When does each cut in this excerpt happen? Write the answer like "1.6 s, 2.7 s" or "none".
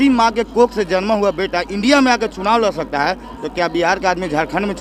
none